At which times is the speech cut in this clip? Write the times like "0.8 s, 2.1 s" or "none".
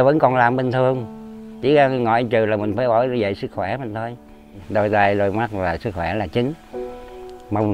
4.5 s